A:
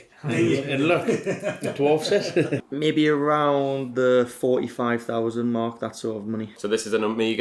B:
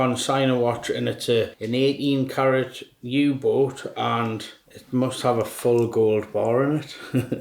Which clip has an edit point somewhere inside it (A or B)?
A